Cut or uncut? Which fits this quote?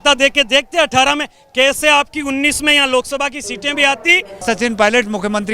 cut